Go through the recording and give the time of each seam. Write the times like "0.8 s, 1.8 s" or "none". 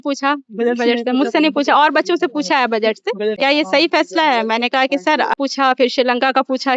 3.4 s, 5.4 s